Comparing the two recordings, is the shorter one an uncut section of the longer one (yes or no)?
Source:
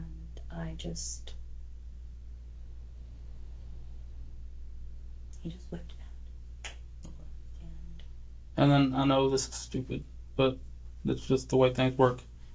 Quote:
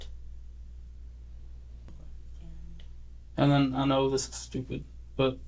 no